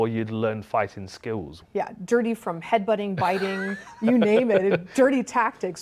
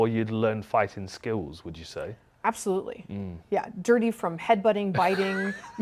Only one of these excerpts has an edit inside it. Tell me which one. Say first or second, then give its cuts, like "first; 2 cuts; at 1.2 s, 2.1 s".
first; 1 cut; at 1.6 s